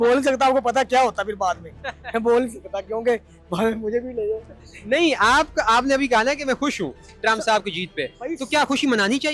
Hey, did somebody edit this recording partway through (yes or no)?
no